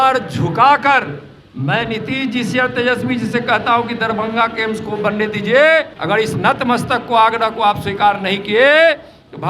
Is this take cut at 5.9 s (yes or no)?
yes